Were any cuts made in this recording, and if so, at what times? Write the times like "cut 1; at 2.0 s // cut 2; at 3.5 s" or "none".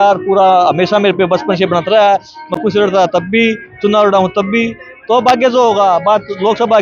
none